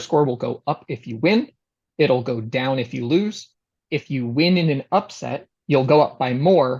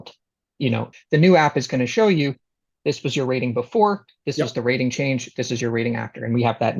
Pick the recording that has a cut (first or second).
second